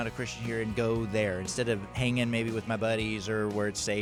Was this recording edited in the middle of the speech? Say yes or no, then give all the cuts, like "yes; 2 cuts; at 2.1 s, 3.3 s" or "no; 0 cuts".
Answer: no; 0 cuts